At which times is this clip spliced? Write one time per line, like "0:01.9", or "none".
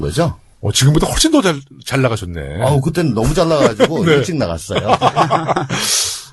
0:01.7